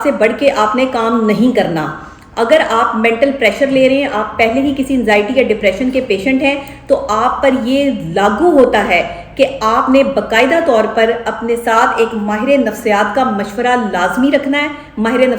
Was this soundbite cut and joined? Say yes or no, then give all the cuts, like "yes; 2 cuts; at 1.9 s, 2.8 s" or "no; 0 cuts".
no; 0 cuts